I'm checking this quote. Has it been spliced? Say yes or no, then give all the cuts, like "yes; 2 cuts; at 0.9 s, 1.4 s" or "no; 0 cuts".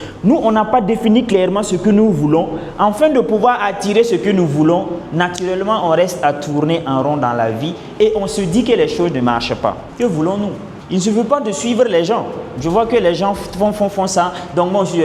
yes; 2 cuts; at 9.9 s, 10.7 s